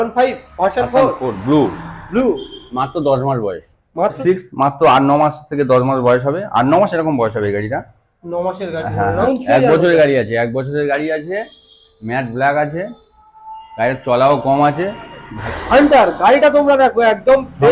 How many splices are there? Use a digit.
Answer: 3